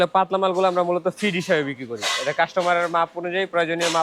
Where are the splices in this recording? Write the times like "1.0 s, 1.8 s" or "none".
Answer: none